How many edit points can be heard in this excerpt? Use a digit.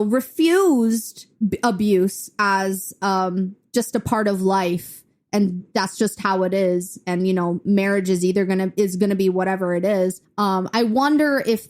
2